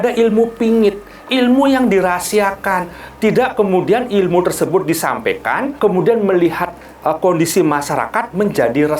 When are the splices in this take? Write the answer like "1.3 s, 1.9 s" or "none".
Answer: 5.7 s